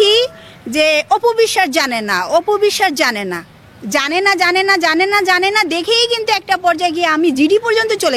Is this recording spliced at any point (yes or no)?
no